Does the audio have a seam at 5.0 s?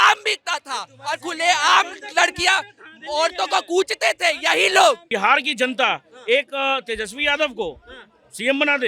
yes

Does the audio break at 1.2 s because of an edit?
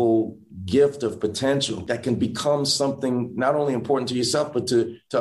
no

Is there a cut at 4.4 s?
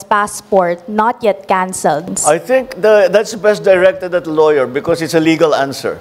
no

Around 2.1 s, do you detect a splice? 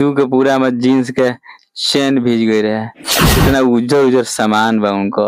no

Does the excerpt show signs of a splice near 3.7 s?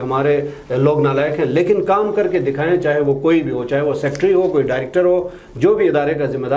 no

